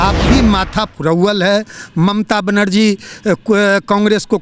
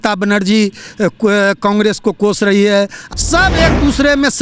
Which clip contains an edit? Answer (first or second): second